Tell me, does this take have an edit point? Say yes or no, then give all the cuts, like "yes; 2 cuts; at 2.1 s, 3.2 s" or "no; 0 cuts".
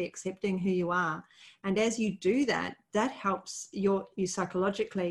no; 0 cuts